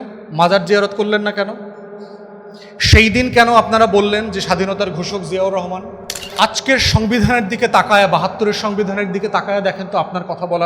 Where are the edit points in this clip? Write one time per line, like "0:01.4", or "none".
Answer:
0:06.4